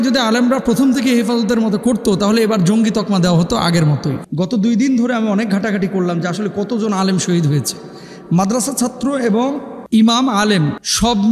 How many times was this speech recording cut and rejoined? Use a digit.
1